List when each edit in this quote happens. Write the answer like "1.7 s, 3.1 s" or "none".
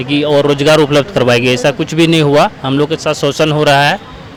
none